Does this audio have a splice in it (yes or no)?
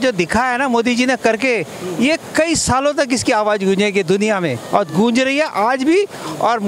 no